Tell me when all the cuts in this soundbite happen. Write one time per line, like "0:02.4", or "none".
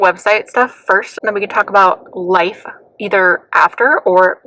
none